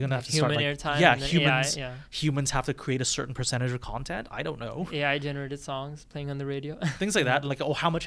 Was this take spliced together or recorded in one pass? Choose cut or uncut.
uncut